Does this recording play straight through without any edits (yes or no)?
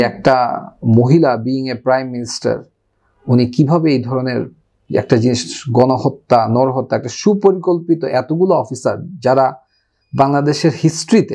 yes